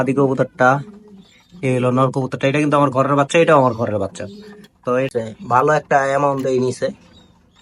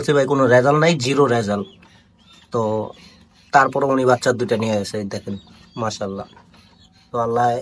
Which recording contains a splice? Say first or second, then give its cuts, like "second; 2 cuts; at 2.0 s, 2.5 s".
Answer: first; 1 cut; at 5.1 s